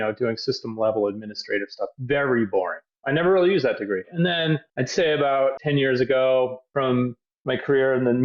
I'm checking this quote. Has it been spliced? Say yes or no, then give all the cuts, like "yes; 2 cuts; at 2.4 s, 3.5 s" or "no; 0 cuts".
yes; 2 cuts; at 2.8 s, 4.1 s